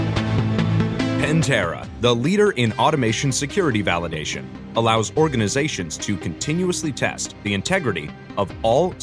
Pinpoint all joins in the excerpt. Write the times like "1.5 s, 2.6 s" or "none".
1.3 s

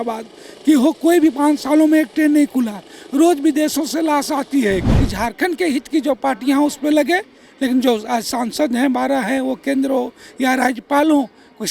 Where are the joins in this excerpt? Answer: 5.0 s

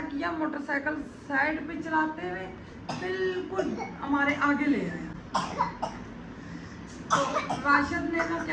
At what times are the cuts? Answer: none

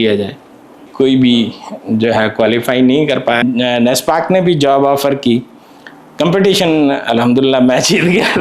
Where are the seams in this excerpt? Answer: 0.8 s, 3.4 s

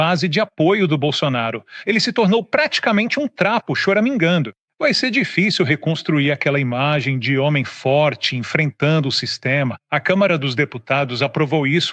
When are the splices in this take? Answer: 1.7 s, 9.9 s

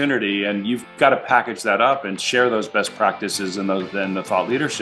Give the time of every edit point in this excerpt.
none

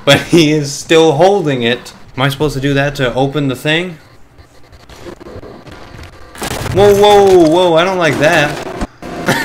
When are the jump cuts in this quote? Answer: 2.0 s

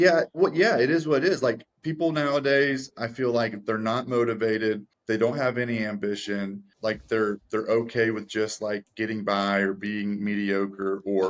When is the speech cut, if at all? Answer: 4.9 s, 6.7 s

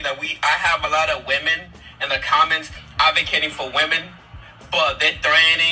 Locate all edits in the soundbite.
none

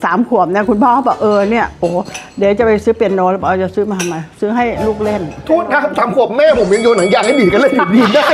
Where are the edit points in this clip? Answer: none

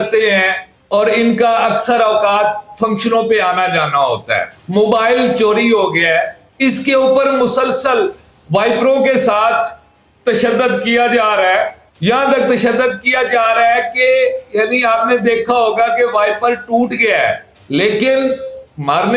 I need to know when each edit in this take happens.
4.5 s, 6.4 s

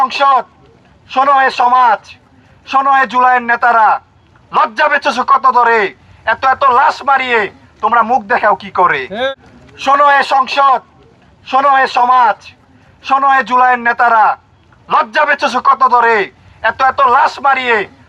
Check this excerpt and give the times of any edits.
9.3 s

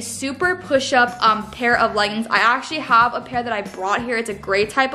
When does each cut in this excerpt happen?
none

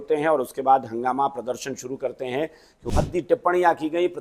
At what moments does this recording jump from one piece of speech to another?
2.9 s

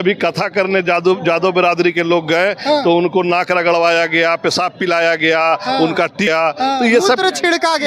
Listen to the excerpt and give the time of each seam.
6.3 s

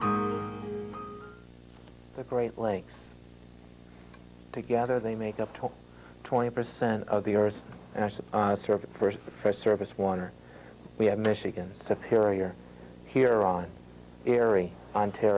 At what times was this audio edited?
9.2 s

